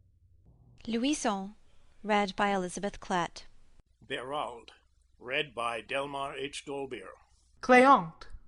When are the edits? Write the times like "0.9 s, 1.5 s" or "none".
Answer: 3.6 s